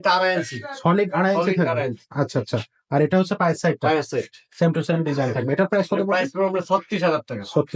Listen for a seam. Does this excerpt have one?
no; 0 cuts

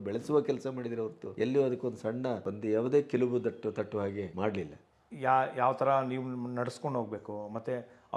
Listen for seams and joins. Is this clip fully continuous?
no; 3 cuts; at 1.2 s, 2.5 s, 4.5 s

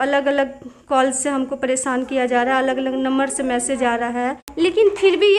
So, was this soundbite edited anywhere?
yes; 1 cut; at 4.4 s

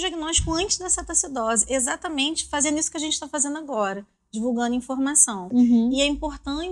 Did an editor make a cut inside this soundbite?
yes; 1 cut; at 5.4 s

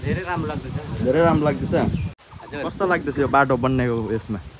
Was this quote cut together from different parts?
yes; 1 cut; at 2.1 s

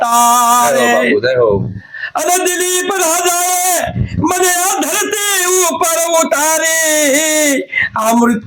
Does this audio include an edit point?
no; 0 cuts

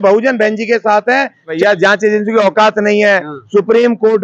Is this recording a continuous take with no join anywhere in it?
no; 1 cut; at 1.5 s

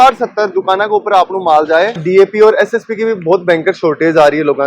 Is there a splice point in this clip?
yes; 1 cut; at 2.0 s

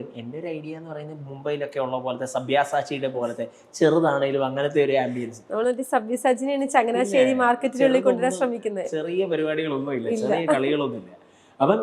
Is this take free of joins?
yes; 0 cuts

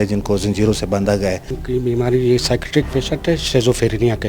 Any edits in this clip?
yes; 1 cut; at 1.5 s

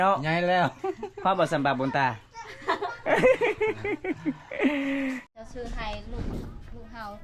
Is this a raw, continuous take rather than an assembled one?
yes; 0 cuts

